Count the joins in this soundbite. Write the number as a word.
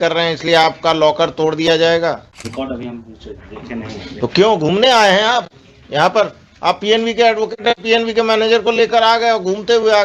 one